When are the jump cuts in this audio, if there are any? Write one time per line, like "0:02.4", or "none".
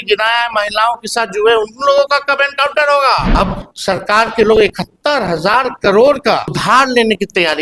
0:03.3
0:06.6

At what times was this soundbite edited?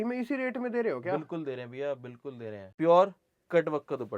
0:02.6

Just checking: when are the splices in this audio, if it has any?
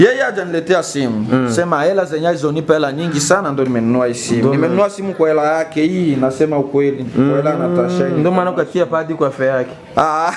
none

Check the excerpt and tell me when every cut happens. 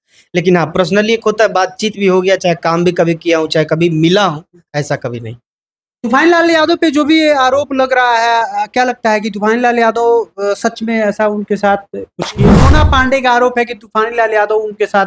0:12.5

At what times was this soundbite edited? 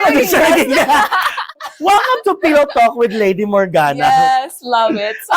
0:01.6

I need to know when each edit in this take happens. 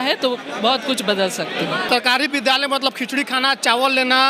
0:01.8

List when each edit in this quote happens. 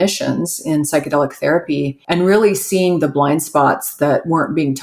0:02.0

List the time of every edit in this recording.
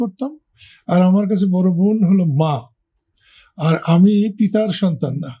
none

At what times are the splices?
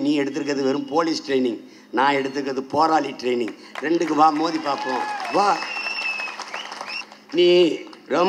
0:07.0

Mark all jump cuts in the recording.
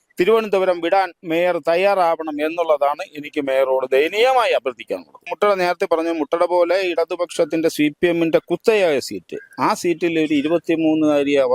0:05.3

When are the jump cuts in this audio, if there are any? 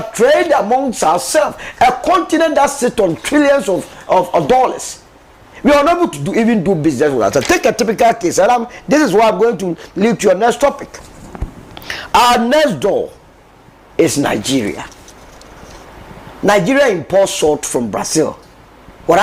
none

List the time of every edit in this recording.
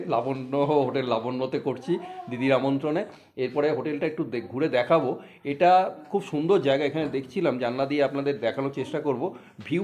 none

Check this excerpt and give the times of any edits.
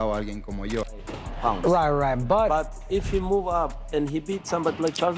0:00.9

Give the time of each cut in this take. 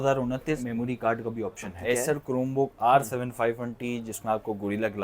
0:01.7

